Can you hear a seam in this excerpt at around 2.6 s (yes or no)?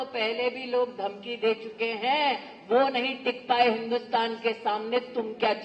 no